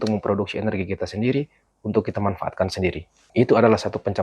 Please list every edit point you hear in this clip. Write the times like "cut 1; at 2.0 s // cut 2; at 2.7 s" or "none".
cut 1; at 3.1 s